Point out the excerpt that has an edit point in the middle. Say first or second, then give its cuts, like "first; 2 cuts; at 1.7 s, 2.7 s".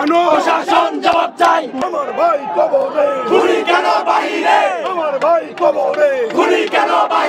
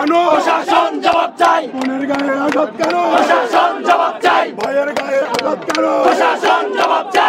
first; 1 cut; at 1.8 s